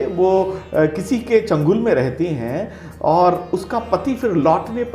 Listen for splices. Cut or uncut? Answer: uncut